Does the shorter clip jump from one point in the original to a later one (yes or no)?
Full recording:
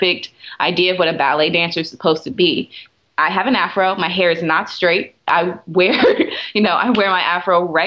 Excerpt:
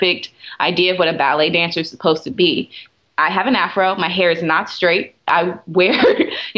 no